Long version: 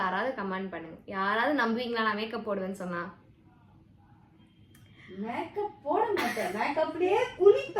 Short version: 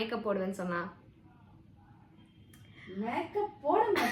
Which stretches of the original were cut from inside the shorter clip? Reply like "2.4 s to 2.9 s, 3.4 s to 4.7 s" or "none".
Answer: none